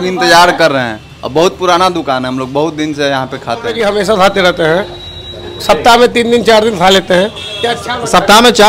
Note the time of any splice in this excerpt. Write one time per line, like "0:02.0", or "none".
none

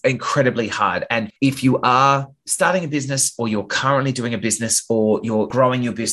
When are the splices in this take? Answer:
0:01.3

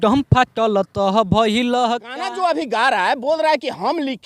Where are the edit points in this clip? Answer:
0:02.1

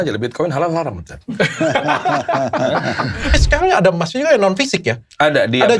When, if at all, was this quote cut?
0:03.4

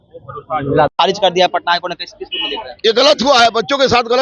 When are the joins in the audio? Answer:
0:00.9

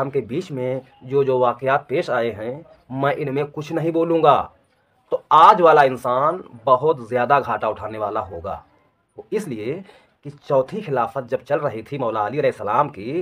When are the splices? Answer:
none

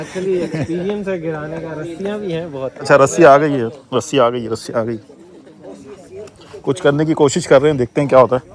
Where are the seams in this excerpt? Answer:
none

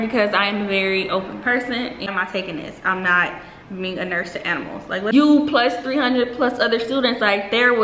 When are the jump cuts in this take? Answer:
0:02.1
0:05.1

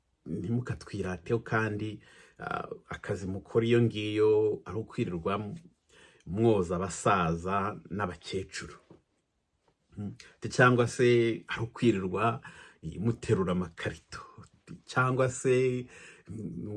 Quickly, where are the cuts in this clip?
none

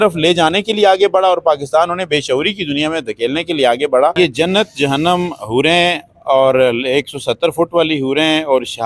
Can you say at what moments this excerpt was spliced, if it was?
0:04.1

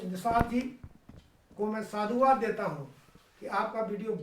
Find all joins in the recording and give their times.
none

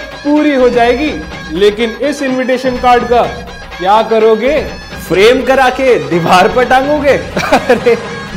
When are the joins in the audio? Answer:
0:06.4

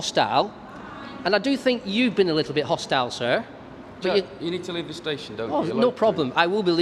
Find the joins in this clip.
none

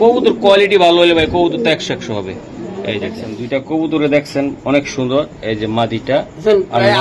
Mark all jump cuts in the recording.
0:03.3

